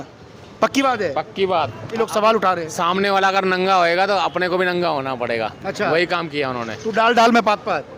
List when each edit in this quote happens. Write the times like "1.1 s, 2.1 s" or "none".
2.0 s